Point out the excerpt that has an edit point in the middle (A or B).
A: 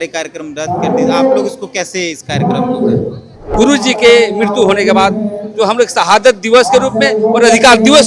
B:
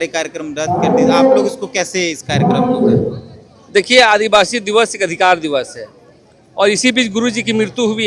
A